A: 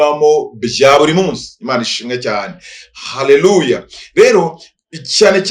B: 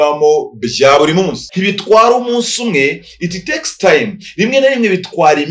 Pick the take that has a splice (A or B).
B